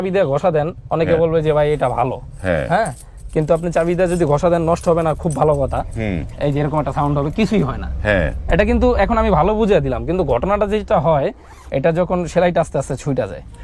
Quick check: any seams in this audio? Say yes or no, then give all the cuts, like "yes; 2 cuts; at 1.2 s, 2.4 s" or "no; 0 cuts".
no; 0 cuts